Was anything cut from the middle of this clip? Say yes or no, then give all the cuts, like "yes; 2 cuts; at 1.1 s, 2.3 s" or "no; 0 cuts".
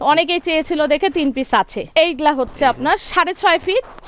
yes; 1 cut; at 1.8 s